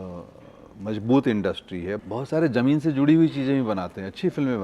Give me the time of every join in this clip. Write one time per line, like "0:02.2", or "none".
0:02.0

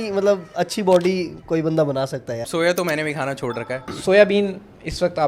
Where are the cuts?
0:02.5
0:03.9

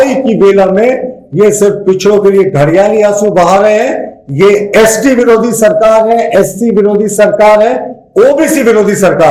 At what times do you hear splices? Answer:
none

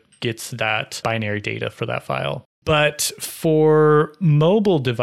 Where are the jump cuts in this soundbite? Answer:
0:01.0
0:02.5

